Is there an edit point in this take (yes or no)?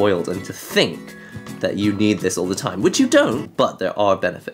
yes